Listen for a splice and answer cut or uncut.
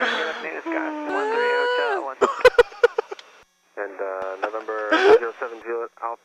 uncut